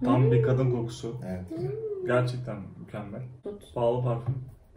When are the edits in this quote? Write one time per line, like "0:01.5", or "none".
0:03.4

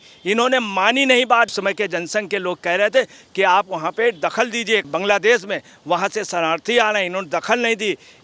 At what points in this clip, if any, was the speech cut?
0:01.5
0:04.9

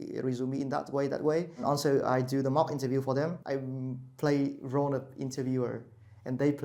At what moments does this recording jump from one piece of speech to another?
0:01.6
0:03.4

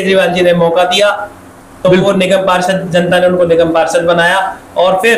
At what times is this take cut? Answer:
none

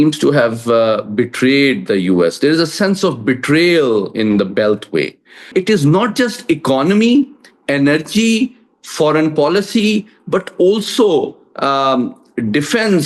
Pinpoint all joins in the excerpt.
0:05.5

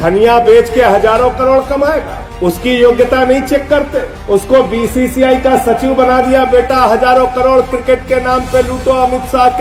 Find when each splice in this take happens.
none

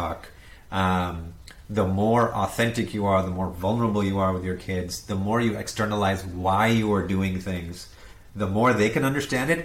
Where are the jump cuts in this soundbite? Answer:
none

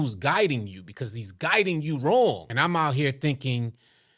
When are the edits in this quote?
0:02.4

